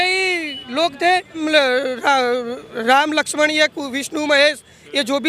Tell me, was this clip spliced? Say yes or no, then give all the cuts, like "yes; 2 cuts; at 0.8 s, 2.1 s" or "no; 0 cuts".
yes; 1 cut; at 1.4 s